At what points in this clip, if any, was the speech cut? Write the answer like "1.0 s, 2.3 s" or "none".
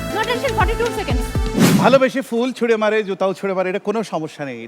1.6 s